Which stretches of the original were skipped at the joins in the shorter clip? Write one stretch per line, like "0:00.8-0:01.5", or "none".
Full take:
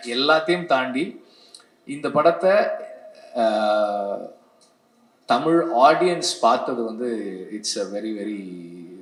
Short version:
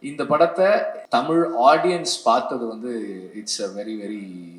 0:02.8-0:05.1

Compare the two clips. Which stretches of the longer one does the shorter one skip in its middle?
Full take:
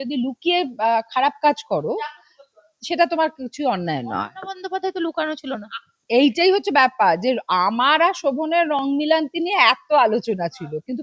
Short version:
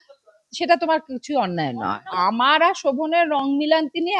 0:04.4-0:07.5

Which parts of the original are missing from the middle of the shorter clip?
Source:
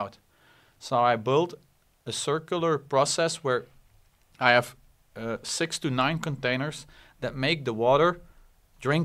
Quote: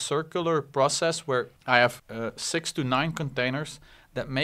0:03.7-0:04.3
0:04.8-0:05.1

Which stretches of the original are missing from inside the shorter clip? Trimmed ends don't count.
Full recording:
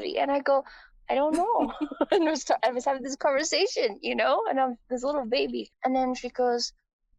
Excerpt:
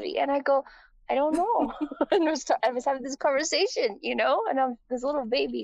none

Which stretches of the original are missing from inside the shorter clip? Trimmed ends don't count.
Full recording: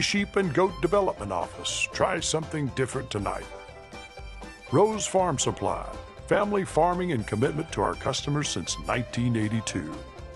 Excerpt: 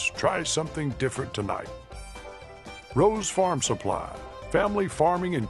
none

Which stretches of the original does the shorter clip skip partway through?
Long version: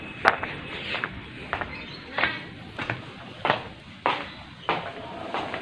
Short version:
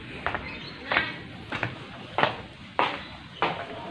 none

